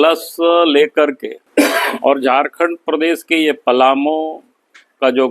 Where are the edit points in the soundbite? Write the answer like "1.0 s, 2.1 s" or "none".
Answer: 1.3 s

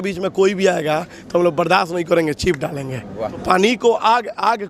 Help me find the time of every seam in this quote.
3.4 s

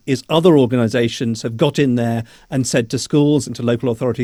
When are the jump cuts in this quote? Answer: none

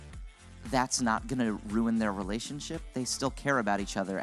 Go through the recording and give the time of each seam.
none

